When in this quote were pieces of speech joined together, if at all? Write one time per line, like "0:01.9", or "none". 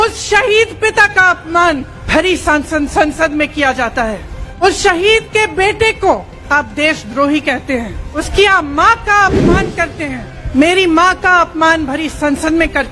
0:02.0
0:04.6
0:06.3
0:08.1
0:10.3

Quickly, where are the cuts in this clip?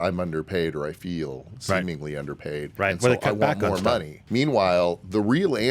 0:02.7
0:04.2

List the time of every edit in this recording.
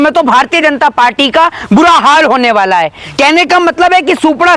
none

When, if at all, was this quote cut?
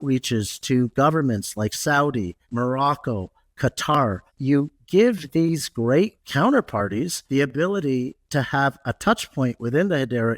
0:02.4
0:04.3
0:06.2
0:07.2

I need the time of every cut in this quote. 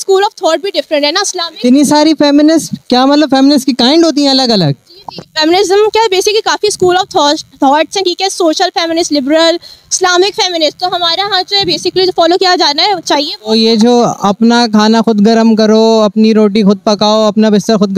none

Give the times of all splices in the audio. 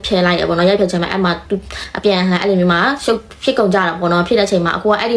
none

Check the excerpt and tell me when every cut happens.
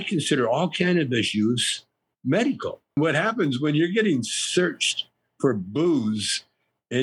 0:03.0

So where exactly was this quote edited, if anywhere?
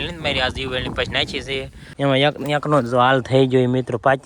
0:01.8

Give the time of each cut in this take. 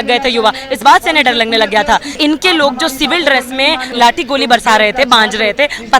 0:02.1
0:03.9

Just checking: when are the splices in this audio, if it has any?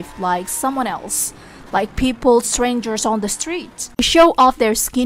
0:04.0

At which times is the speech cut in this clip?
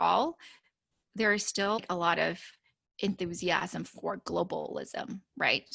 0:01.8

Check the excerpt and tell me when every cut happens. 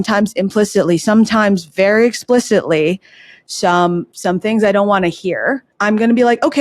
0:05.7

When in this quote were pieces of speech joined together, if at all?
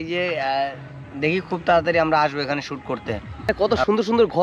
0:03.5

